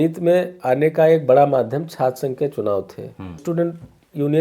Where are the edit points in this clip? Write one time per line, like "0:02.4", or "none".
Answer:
0:03.4